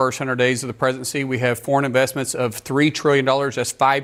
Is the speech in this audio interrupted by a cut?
no; 0 cuts

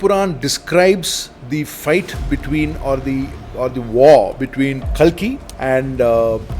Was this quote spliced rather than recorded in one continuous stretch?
yes; 2 cuts; at 4.8 s, 5.5 s

